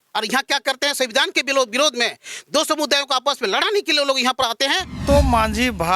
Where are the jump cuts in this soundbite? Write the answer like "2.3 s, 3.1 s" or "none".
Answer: 5.0 s

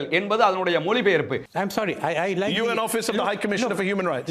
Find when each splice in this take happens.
1.5 s

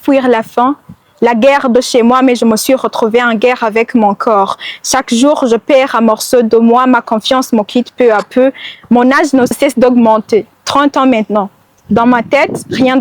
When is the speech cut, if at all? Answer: 9.5 s

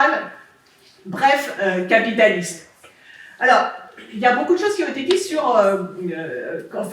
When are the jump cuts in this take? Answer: none

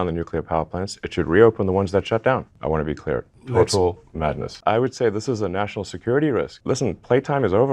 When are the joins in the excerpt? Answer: 2.5 s, 4.6 s, 6.6 s

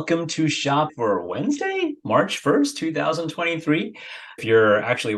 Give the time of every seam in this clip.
0.9 s, 4.4 s

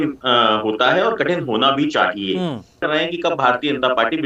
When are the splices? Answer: 2.8 s

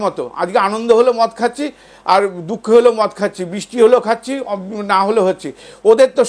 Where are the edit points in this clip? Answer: none

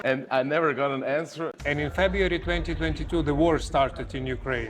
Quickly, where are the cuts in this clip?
1.6 s

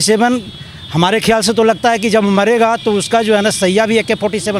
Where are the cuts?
none

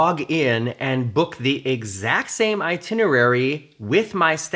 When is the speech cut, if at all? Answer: none

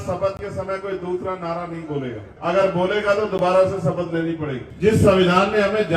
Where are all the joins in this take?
2.3 s, 4.6 s

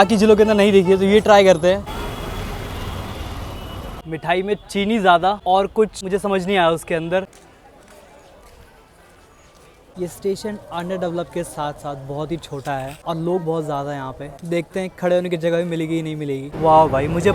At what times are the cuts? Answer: none

